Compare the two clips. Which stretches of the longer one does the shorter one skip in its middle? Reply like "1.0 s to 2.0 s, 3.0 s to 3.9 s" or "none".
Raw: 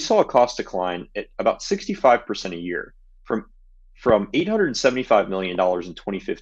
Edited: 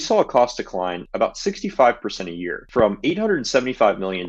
1.0 s to 1.3 s, 2.8 s to 3.9 s